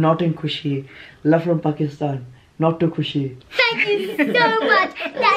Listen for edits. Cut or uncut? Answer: cut